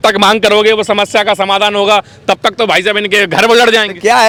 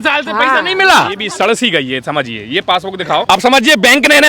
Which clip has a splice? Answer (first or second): second